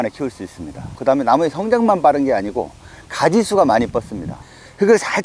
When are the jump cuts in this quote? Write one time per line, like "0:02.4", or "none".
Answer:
0:04.3